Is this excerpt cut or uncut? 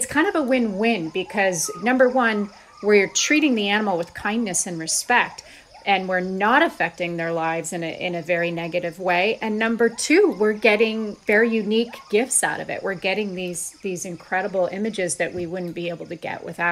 cut